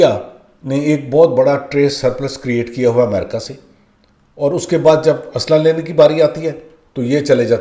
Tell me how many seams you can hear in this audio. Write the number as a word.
zero